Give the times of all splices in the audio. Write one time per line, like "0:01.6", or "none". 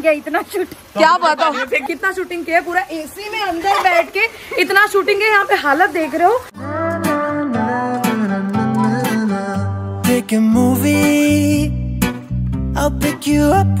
0:01.8
0:06.5